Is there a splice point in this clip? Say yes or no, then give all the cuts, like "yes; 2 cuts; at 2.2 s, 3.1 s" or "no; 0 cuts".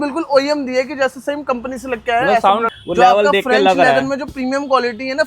yes; 1 cut; at 2.7 s